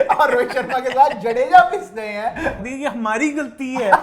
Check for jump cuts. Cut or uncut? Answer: cut